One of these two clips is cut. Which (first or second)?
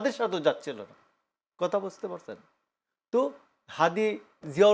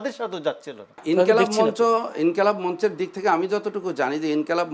second